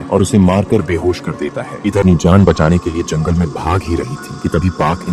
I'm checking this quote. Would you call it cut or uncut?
cut